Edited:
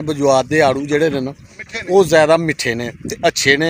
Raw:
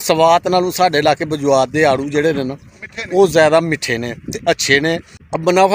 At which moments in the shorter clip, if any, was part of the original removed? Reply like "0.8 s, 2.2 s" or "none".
none